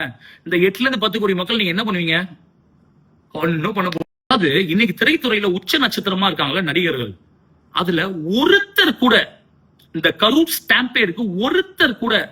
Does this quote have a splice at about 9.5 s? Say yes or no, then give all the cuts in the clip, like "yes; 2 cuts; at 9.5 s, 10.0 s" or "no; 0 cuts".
no; 1 cut; at 4.1 s